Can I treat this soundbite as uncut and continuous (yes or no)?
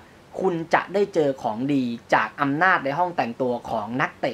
yes